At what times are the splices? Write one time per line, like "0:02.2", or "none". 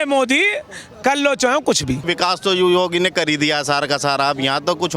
0:02.1